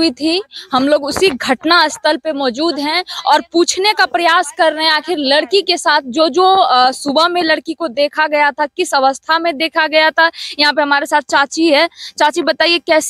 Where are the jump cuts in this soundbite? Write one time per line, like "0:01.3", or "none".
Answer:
none